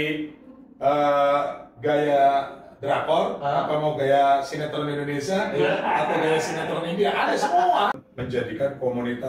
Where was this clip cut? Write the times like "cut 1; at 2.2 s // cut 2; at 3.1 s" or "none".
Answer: cut 1; at 8.0 s